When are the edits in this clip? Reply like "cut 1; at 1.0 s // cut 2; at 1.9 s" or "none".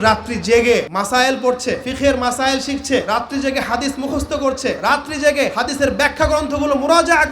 cut 1; at 0.9 s // cut 2; at 1.9 s // cut 3; at 3.1 s // cut 4; at 4.8 s // cut 5; at 5.5 s

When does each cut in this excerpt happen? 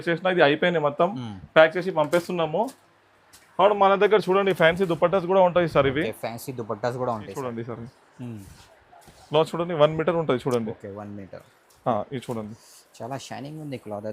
cut 1; at 7.5 s

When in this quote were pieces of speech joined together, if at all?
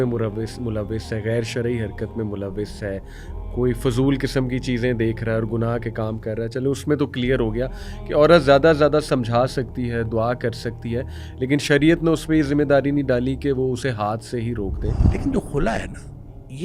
cut 1; at 15.1 s

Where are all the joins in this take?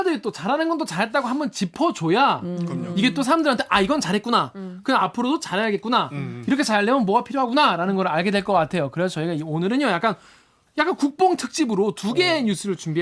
none

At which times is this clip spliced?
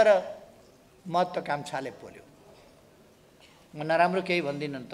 cut 1; at 2.5 s

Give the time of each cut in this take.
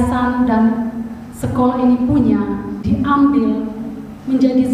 cut 1; at 2.7 s

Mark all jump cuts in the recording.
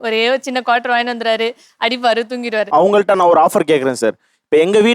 cut 1; at 2.7 s

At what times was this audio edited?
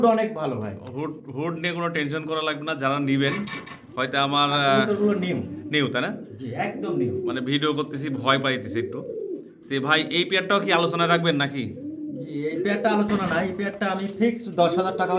none

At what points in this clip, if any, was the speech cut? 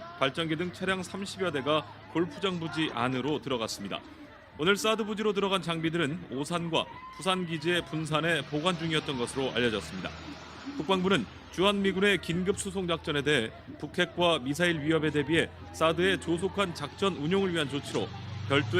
cut 1; at 13.2 s

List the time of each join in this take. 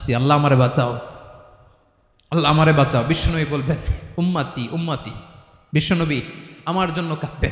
none

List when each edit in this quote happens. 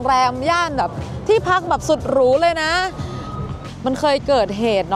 cut 1; at 3.7 s

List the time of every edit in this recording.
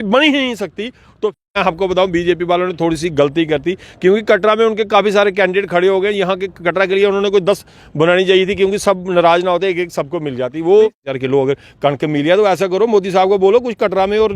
cut 1; at 1.4 s // cut 2; at 11.1 s

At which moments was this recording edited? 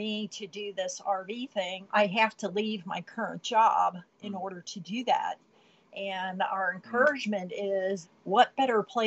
cut 1; at 1.8 s // cut 2; at 8.0 s

